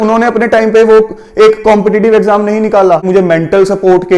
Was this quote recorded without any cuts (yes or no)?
no